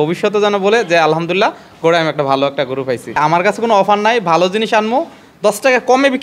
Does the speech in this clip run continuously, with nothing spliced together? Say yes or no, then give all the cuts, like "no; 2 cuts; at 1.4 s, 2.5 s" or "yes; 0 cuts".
no; 1 cut; at 3.2 s